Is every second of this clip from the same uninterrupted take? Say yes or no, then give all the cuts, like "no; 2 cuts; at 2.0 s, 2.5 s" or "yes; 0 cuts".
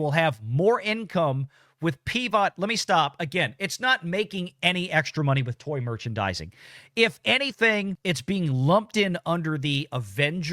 no; 1 cut; at 8.0 s